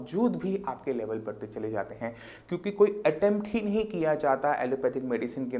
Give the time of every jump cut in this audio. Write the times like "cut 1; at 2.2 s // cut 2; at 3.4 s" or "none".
none